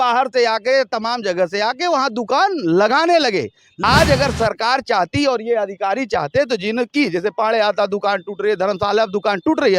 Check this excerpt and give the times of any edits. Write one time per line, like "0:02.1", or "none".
0:03.6